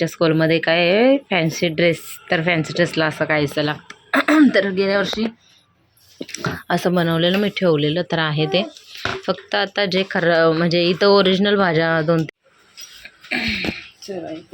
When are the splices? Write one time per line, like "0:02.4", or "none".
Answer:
0:12.3